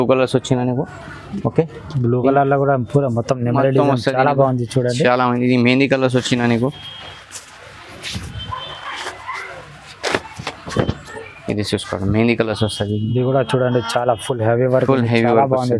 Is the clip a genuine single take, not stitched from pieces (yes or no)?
yes